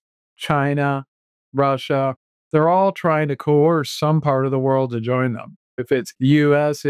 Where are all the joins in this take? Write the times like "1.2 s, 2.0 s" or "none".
2.3 s, 5.7 s